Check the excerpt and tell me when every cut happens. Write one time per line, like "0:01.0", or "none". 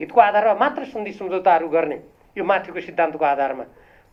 none

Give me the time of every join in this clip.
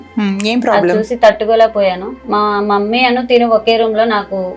0:02.1

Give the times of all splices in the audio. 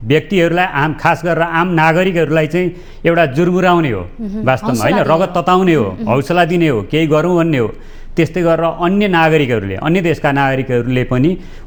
none

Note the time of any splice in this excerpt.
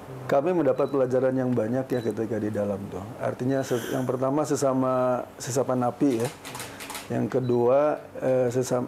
none

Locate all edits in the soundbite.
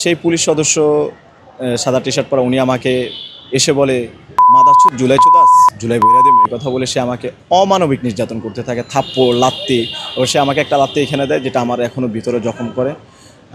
none

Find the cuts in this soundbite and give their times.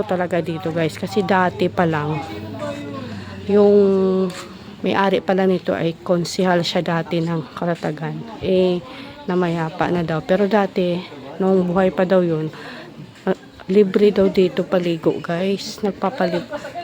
none

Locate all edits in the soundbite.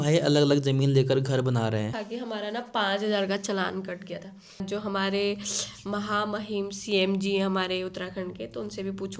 0:02.0
0:04.6

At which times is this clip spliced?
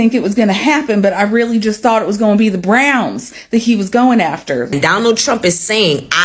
0:04.7

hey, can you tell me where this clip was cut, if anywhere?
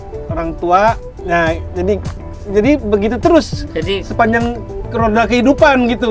0:01.1

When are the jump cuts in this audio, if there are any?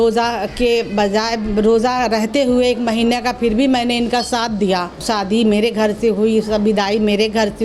0:05.0

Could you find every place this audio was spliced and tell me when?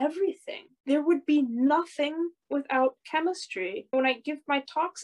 0:03.9

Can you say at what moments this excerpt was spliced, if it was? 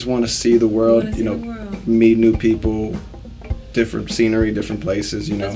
none

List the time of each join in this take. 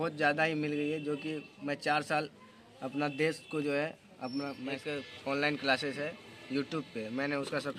0:04.7

